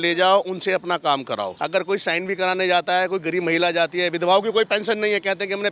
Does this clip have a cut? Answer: yes; 1 cut; at 1.5 s

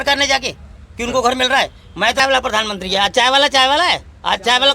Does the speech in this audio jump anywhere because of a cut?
yes; 1 cut; at 2.2 s

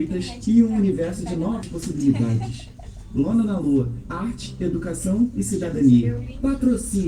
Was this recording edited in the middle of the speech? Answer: yes; 1 cut; at 1.7 s

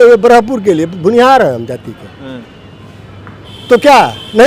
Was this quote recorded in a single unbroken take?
yes; 0 cuts

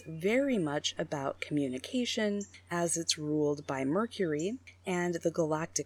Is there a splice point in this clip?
no; 0 cuts

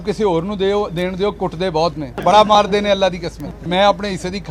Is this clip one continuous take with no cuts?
no; 2 cuts; at 2.1 s, 3.5 s

